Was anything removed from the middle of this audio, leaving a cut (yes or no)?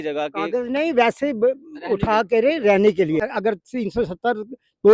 yes